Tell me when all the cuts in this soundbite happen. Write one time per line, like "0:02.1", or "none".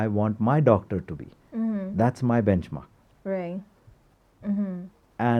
none

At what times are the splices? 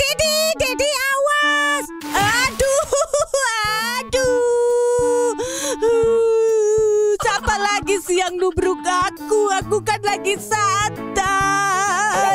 none

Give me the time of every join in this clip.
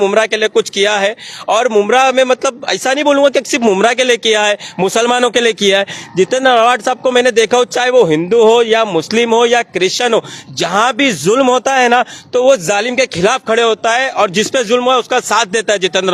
none

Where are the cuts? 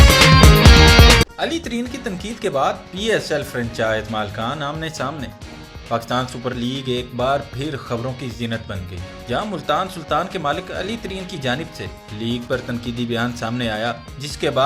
0:01.3

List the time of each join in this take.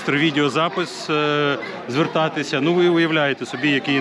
none

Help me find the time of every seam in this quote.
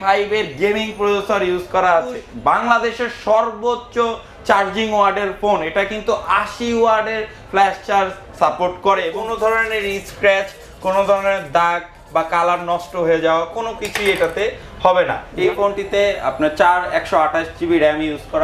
0:02.3
0:09.2
0:15.2

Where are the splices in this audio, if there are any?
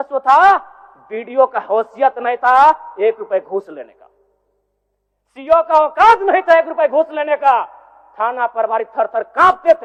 none

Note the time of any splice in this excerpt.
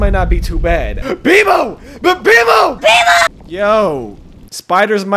0:00.9
0:03.3

